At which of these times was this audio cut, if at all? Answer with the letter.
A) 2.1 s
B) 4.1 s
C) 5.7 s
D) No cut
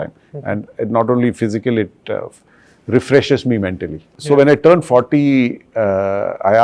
B